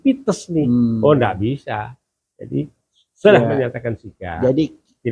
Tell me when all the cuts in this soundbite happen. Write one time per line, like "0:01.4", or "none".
none